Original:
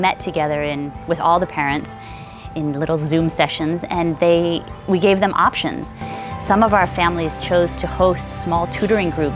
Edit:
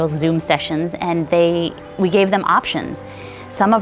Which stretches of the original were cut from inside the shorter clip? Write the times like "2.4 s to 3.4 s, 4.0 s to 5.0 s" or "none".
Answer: none